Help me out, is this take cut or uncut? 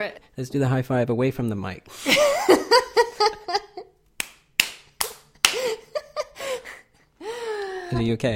uncut